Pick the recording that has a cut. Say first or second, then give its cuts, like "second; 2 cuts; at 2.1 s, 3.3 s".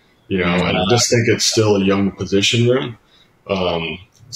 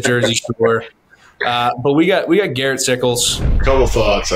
second; 1 cut; at 3.4 s